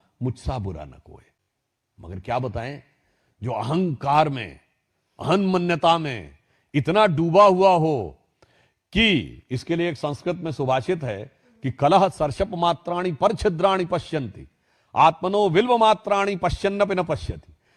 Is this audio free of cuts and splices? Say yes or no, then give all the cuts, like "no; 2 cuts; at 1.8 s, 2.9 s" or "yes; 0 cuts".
yes; 0 cuts